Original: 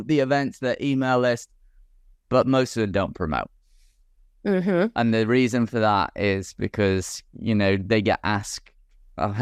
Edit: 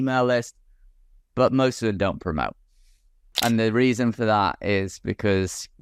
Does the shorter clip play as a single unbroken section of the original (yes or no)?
no